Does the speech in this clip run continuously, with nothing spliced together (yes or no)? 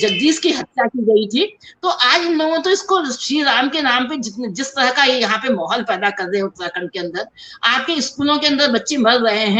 yes